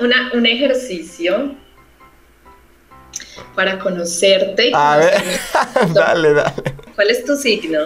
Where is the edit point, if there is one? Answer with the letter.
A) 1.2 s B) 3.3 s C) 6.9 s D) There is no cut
C